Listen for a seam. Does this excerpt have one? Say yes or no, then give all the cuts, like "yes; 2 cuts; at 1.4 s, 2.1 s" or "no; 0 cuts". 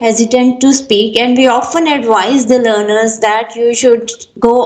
no; 0 cuts